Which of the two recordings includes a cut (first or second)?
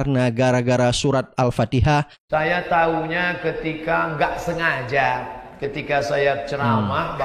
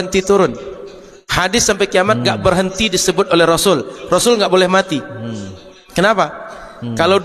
first